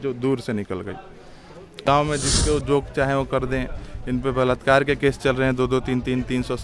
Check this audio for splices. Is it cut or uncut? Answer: cut